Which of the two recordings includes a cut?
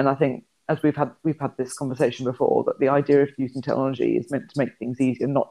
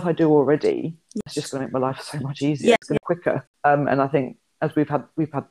second; 2 cuts; at 1.2 s, 2.9 s

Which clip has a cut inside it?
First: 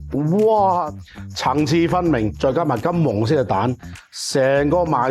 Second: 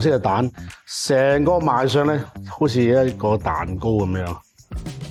first; 2 cuts; at 0.9 s, 2.4 s

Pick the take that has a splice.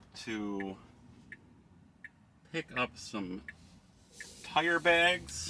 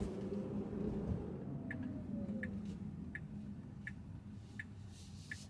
second; 1 cut; at 1.5 s

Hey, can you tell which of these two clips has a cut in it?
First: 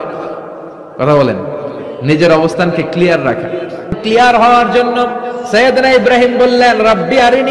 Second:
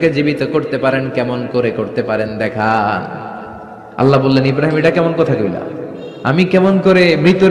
first; 1 cut; at 4.0 s

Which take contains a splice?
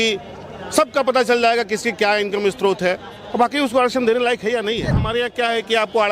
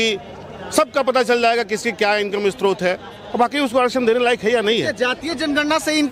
first; 1 cut; at 5.0 s

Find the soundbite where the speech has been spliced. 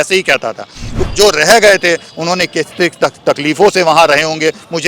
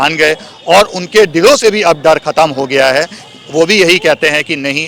first; 1 cut; at 1.0 s

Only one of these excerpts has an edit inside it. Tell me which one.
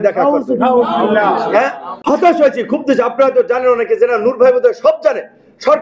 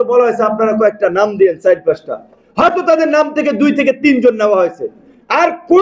first; 1 cut; at 1.9 s

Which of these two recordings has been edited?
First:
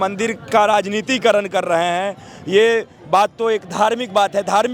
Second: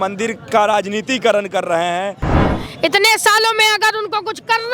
second; 1 cut; at 2.3 s

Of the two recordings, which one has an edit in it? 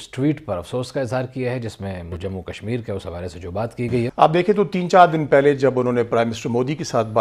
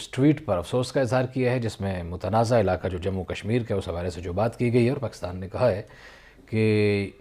first; 2 cuts; at 2.1 s, 4.1 s

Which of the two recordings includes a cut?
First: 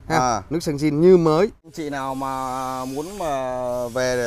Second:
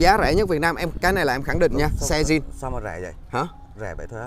first; 1 cut; at 1.7 s

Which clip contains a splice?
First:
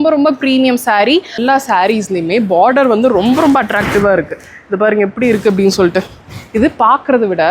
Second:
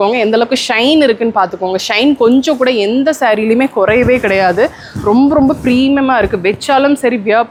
first; 1 cut; at 1.4 s

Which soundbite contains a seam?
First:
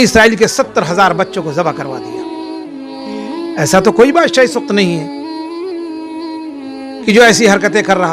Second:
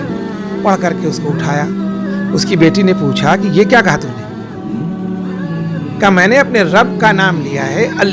second; 2 cuts; at 4.1 s, 5.9 s

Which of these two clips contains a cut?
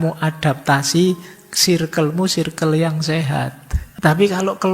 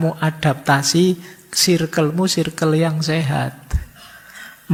first; 1 cut; at 3.8 s

